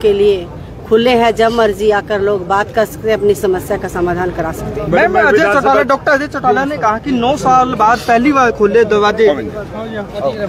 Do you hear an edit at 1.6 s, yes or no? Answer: no